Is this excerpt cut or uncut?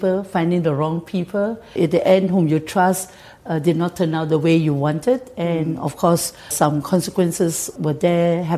cut